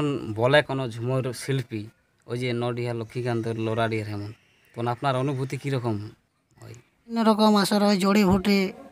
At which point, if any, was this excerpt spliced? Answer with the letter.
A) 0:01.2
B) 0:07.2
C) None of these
B